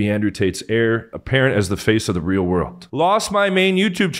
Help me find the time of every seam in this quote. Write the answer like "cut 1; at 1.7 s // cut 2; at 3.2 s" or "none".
cut 1; at 2.8 s